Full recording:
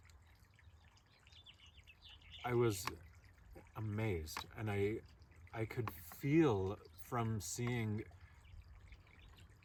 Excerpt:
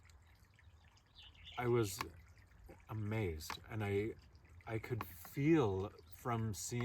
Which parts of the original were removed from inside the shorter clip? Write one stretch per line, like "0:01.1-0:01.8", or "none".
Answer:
0:01.1-0:02.0